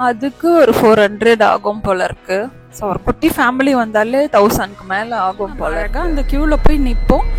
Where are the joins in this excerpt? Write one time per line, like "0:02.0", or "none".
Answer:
0:05.9